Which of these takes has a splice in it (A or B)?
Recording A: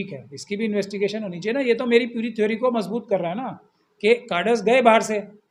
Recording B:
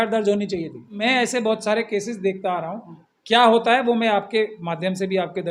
B